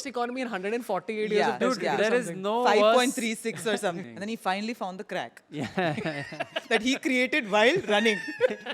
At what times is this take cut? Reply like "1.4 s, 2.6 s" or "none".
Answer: 4.0 s